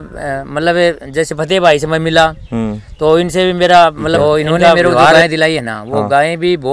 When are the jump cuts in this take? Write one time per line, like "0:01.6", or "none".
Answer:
0:05.1